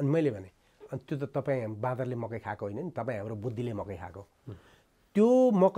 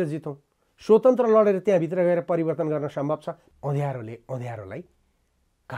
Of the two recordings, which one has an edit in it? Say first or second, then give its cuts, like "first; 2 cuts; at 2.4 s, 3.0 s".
second; 1 cut; at 3.4 s